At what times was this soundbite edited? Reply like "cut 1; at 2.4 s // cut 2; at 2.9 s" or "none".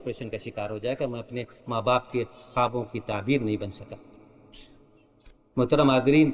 none